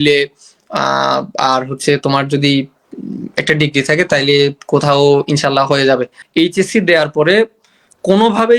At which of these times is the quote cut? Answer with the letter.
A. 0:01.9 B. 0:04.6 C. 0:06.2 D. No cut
C